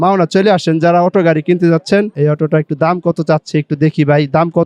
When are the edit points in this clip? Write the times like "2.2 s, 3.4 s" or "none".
2.1 s